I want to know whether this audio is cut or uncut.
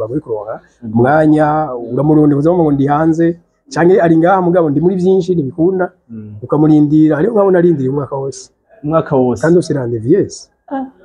uncut